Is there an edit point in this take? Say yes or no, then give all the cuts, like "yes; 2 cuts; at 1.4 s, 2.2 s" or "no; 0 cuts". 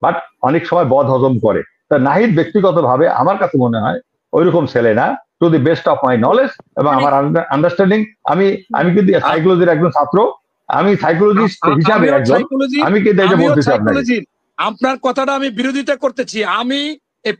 no; 0 cuts